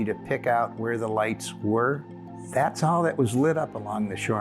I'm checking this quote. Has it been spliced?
yes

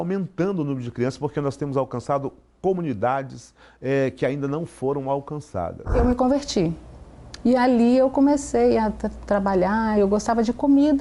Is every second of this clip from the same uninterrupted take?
no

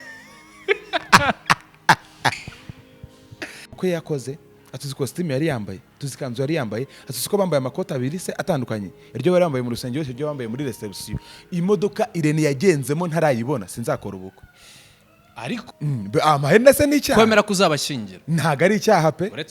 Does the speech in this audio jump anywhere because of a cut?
yes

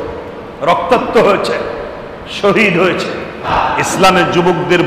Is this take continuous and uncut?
no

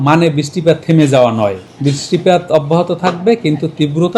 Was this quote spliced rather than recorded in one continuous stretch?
yes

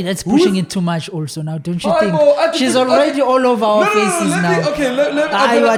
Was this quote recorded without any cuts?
yes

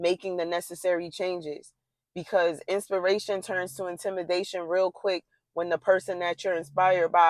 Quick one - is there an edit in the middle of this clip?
no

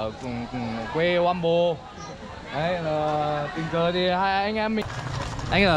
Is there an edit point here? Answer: yes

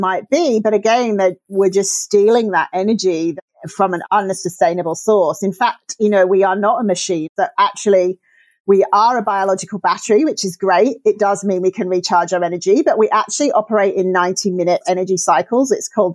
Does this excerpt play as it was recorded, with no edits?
no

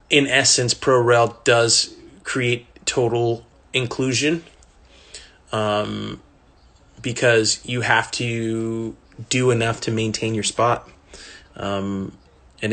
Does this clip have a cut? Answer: no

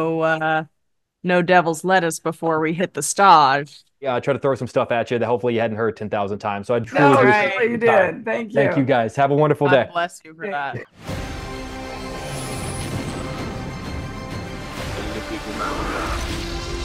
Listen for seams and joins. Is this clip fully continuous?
no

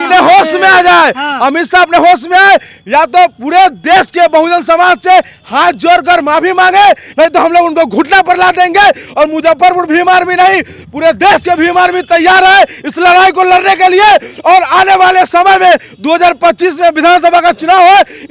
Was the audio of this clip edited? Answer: no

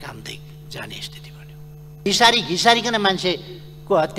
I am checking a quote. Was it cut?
yes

